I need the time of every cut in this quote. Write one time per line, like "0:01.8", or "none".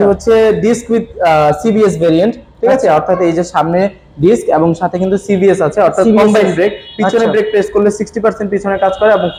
none

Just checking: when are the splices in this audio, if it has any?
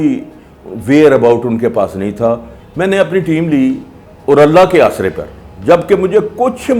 0:02.6

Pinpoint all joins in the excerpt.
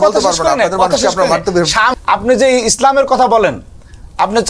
0:01.9

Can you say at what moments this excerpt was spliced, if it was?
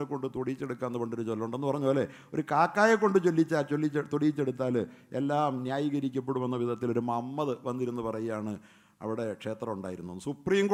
none

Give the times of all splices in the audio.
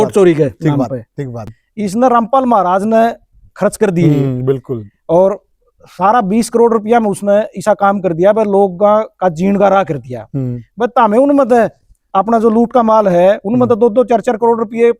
0:01.5

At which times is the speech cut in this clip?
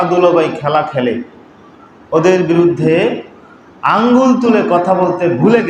none

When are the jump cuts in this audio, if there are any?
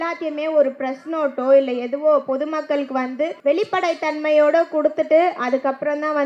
0:03.4

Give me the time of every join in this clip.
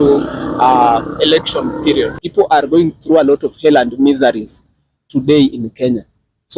0:02.2

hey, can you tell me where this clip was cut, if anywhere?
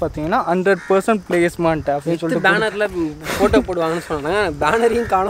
none

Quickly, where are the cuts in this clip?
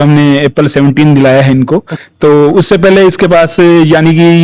none

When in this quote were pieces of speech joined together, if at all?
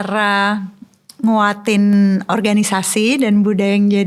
none

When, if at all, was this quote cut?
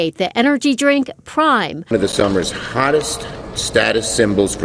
0:01.9

